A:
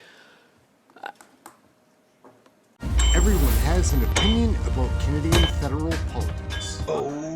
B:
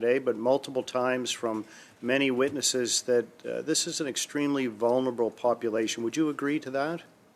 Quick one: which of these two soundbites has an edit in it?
A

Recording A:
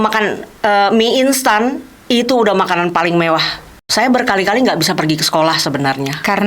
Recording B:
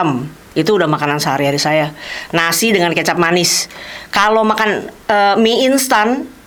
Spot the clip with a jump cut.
A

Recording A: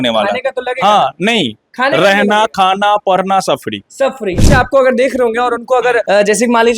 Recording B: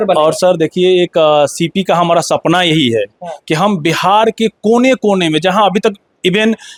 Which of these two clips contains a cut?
A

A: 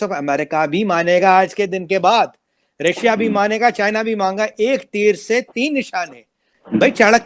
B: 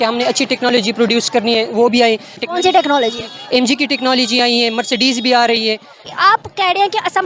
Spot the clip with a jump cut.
B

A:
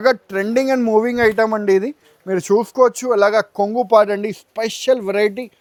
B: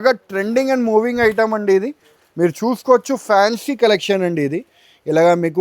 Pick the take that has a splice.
B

